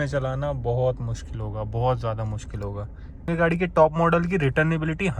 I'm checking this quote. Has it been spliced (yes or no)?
yes